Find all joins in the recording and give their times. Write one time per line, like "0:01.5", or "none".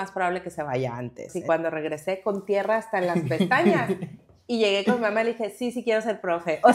0:01.4

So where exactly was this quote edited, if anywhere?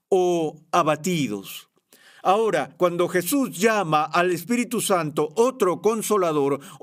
none

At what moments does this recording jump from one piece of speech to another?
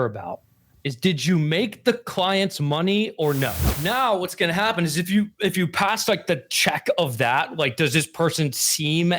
0:03.8

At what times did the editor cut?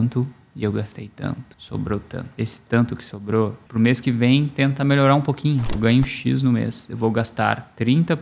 0:01.5
0:02.3
0:03.6
0:05.8

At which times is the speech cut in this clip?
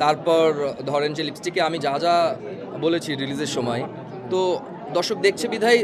none

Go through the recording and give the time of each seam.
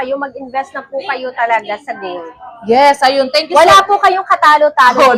none

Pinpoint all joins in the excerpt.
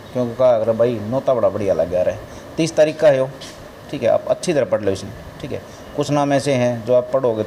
none

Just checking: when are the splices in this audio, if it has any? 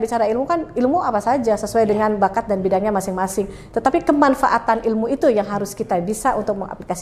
none

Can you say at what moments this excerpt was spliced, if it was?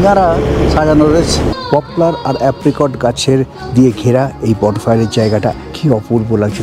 0:01.5
0:05.7

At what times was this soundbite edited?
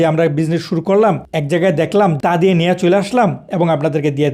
none

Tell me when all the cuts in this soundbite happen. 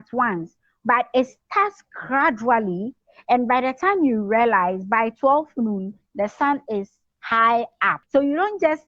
0:07.9

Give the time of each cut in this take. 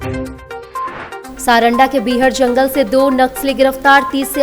0:01.2

